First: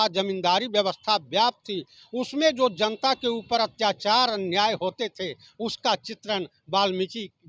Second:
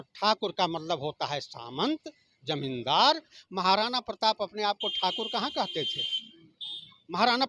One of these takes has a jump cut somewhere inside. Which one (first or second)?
second